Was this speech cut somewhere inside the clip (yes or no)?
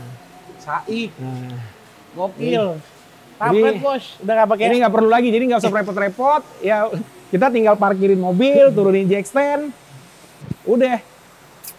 no